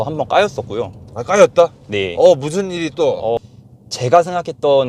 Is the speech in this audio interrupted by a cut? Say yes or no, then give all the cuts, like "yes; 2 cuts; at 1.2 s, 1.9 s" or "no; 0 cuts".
yes; 1 cut; at 3.4 s